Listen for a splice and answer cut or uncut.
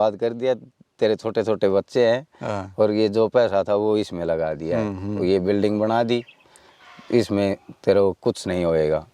uncut